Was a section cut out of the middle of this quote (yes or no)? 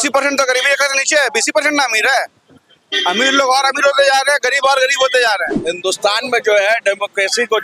yes